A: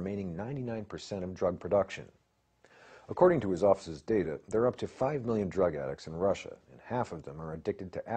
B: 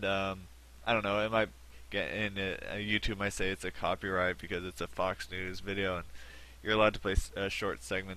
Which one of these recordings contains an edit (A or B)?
A